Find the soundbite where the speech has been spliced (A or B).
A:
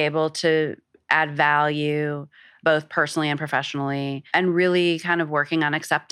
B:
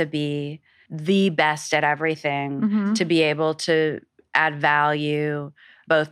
A